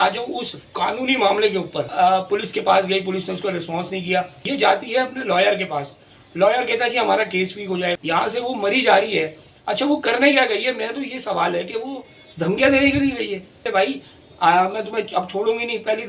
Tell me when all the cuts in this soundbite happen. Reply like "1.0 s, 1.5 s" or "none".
2.2 s, 4.4 s, 7.9 s, 13.6 s